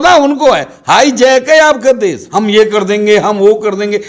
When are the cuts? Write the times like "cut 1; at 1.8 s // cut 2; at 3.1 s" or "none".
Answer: cut 1; at 2.2 s